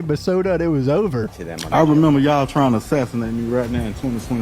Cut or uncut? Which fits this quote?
cut